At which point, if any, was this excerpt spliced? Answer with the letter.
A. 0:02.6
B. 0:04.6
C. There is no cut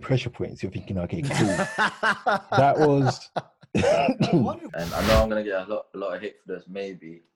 B